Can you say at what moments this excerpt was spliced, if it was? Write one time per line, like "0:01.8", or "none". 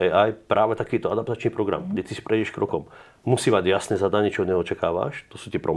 none